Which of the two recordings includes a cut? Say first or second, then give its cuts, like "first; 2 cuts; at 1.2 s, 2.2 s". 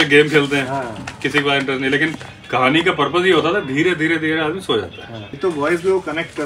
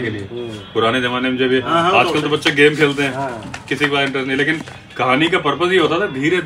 first; 1 cut; at 5.3 s